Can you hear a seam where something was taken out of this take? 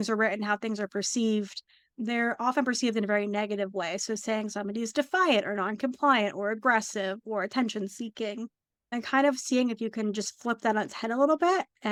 no; 0 cuts

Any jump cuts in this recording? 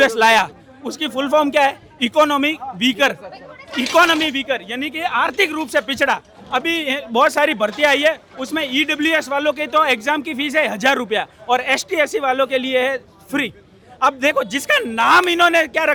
no; 0 cuts

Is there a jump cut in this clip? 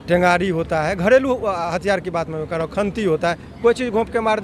no; 0 cuts

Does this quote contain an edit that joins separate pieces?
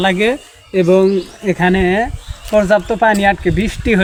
no; 0 cuts

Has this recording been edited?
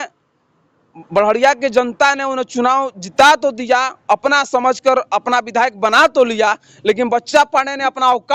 no; 0 cuts

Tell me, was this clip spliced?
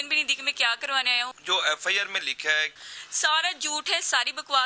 yes; 2 cuts; at 1.4 s, 2.8 s

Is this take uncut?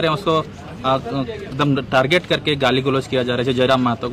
yes; 0 cuts

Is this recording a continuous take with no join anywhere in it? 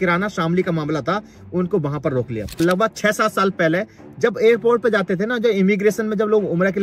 no; 1 cut; at 2.6 s

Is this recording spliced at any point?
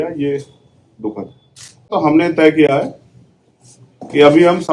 yes; 1 cut; at 1.9 s

